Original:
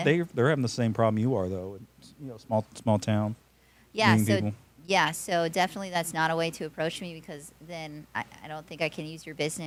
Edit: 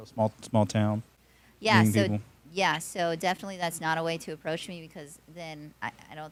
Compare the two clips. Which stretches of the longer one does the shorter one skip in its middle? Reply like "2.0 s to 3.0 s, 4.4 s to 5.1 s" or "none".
none